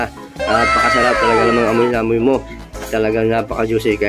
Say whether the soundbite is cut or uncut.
uncut